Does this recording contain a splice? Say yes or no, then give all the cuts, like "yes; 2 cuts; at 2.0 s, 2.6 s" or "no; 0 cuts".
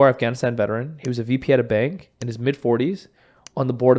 no; 0 cuts